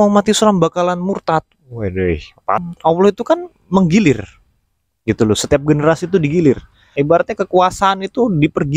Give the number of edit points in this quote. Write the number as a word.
two